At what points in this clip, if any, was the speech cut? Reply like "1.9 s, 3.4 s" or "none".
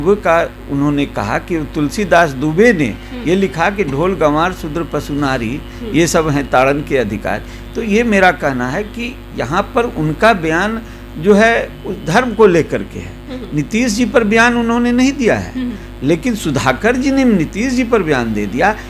none

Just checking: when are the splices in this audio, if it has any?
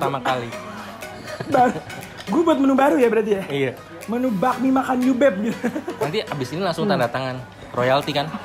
none

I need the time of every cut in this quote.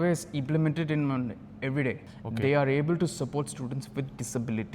2.1 s

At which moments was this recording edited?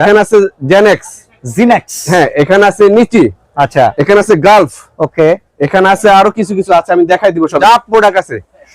7.6 s

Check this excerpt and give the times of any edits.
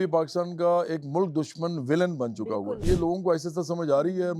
2.8 s

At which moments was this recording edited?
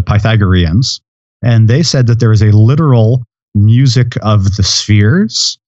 1.4 s

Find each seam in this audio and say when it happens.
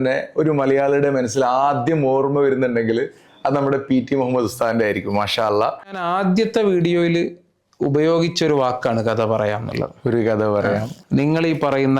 6.0 s, 10.9 s

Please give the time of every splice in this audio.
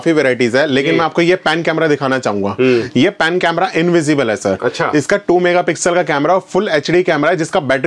none

